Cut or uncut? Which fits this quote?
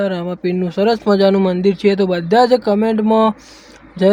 uncut